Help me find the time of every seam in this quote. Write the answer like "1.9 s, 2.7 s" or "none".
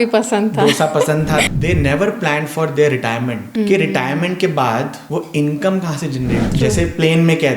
1.5 s, 3.4 s, 5.0 s, 6.5 s